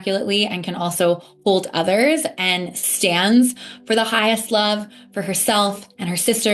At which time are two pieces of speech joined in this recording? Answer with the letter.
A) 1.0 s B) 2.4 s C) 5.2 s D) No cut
D